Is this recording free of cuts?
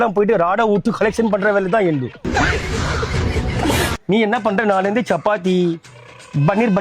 no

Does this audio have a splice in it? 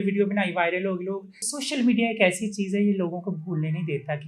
yes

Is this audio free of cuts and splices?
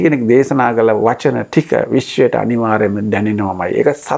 yes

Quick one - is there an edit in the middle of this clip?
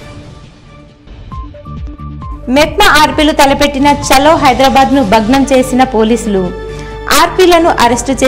yes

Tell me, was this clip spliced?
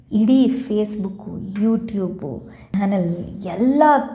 yes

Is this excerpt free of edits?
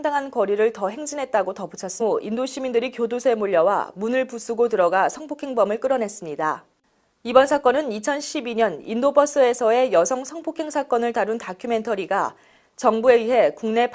yes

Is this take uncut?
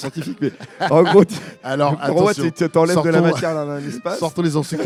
yes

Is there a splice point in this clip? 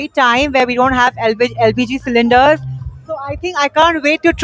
no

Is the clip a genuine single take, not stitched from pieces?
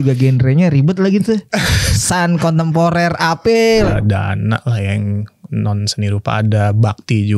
no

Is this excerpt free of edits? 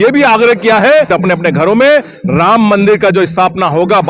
no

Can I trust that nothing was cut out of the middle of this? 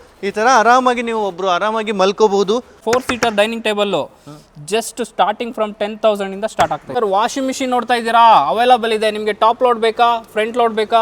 no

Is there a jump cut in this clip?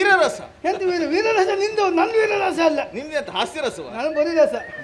no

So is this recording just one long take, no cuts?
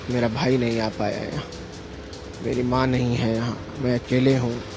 yes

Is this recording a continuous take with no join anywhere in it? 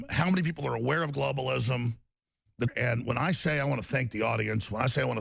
yes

